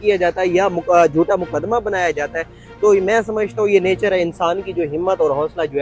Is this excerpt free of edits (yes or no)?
yes